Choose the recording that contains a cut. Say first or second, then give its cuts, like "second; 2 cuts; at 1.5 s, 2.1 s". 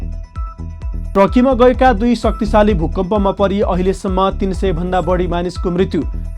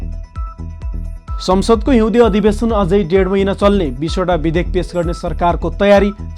second; 1 cut; at 1.1 s